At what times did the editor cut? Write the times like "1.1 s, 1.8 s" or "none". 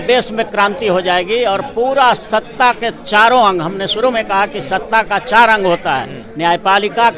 none

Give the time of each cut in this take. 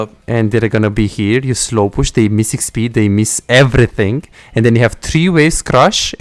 none

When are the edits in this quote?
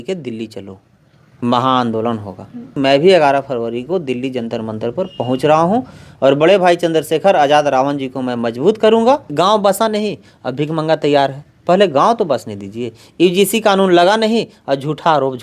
2.7 s, 9.3 s

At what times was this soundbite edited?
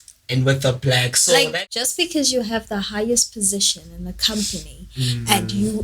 1.5 s

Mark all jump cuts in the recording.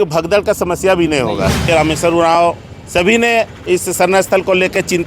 1.6 s

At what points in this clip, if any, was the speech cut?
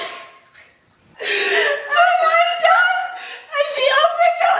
1.1 s

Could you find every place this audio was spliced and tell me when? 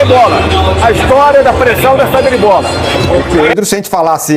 3.3 s

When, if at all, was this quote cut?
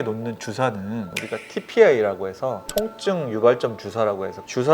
1.1 s

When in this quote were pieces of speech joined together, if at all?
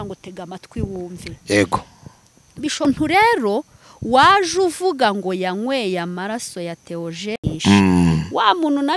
2.9 s

